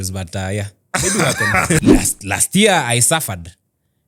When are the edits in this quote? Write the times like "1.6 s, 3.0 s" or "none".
1.8 s